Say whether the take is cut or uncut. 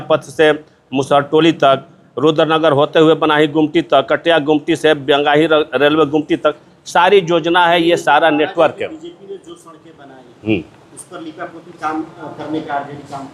uncut